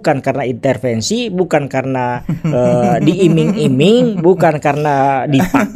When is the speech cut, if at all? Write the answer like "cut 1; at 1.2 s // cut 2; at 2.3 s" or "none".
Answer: none